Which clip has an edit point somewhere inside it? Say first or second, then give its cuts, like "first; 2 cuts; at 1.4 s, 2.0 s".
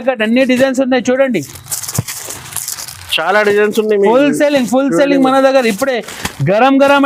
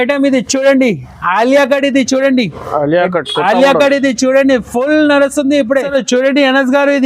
second; 1 cut; at 5.9 s